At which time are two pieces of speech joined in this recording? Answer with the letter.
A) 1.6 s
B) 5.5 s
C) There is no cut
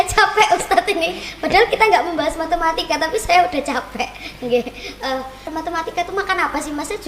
B